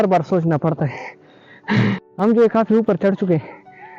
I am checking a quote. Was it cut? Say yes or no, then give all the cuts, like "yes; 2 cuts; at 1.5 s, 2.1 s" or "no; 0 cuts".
yes; 1 cut; at 2.0 s